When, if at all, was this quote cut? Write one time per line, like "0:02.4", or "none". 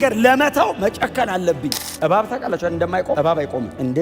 0:01.8
0:03.3